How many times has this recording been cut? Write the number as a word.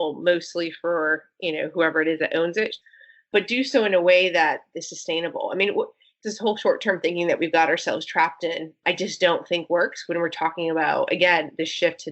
two